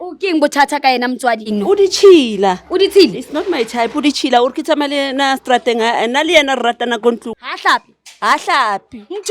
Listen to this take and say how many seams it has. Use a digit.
2